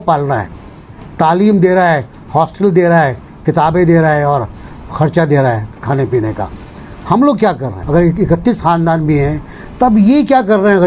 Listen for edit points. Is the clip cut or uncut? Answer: cut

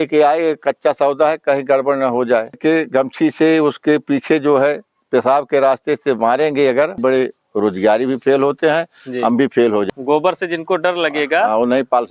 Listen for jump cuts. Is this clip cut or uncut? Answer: cut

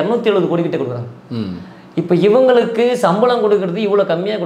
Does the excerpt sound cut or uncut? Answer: uncut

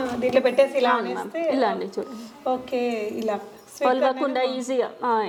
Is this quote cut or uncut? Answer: uncut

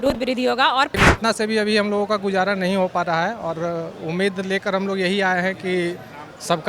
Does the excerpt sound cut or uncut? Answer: cut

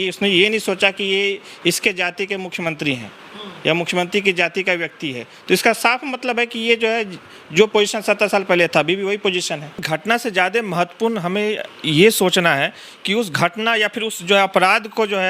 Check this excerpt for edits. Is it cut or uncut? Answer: cut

